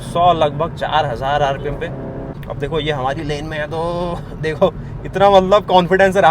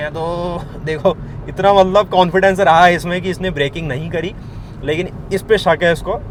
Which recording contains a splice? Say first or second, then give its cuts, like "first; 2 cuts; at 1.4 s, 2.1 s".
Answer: first; 1 cut; at 2.3 s